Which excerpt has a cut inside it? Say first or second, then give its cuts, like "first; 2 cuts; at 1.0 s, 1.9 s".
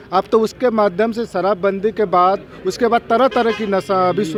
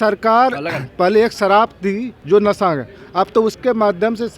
second; 1 cut; at 2.1 s